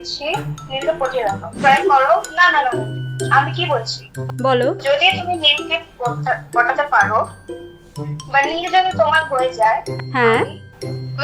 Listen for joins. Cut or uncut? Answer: cut